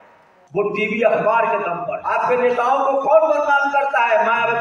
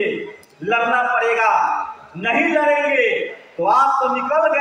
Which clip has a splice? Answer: first; 1 cut; at 1.9 s

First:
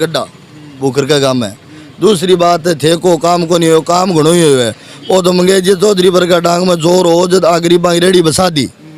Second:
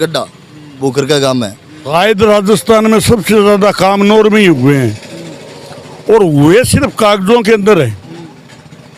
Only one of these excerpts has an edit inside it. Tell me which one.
second; 1 cut; at 1.7 s

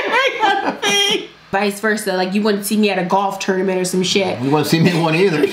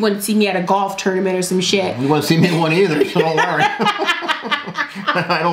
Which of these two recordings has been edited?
first; 1 cut; at 1.5 s

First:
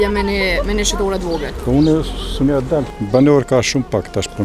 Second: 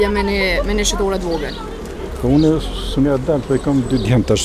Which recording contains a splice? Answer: first; 2 cuts; at 1.5 s, 2.9 s

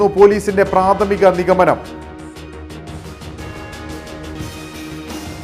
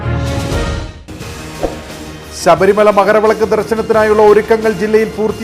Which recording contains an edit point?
second; 1 cut; at 0.9 s

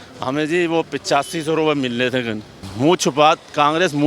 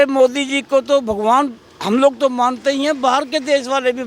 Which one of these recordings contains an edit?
first; 1 cut; at 2.7 s

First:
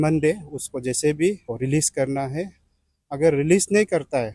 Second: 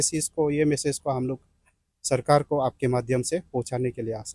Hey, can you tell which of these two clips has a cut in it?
first; 1 cut; at 1.5 s

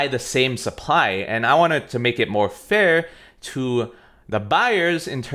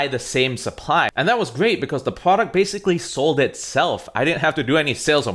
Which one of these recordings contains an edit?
second; 1 cut; at 1.1 s

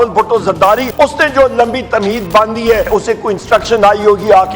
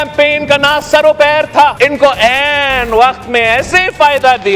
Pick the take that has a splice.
first; 2 cuts; at 0.9 s, 2.9 s

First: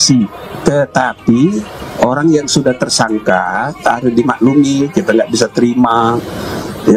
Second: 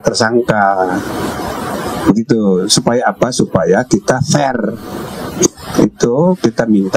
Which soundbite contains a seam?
second; 1 cut; at 5.5 s

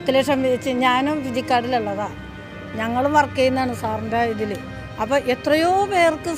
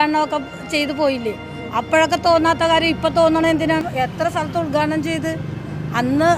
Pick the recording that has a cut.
second; 1 cut; at 3.8 s

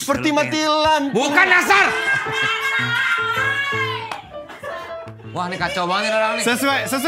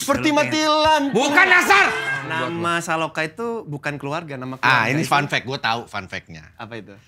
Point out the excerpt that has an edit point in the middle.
second; 1 cut; at 2.2 s

